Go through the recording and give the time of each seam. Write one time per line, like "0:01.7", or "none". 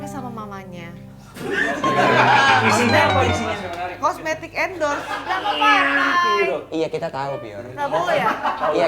0:01.3
0:05.2

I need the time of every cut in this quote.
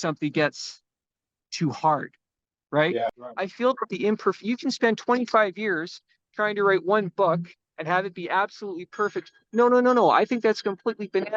0:03.2

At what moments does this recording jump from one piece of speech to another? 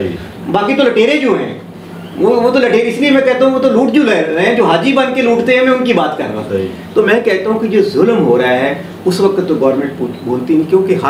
none

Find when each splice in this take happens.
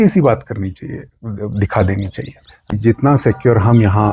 0:02.7

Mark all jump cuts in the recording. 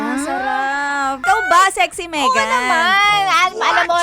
0:01.2

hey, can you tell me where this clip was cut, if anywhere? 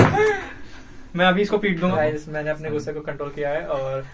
0:01.9

